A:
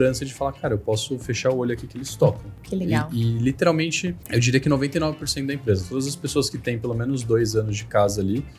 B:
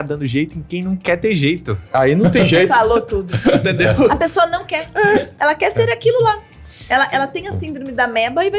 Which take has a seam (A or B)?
A